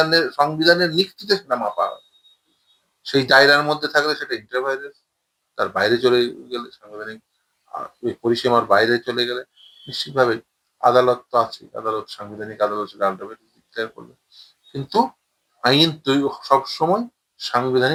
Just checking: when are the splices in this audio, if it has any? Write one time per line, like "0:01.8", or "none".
none